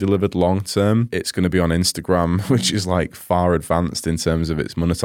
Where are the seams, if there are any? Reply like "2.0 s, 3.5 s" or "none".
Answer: 1.2 s, 2.4 s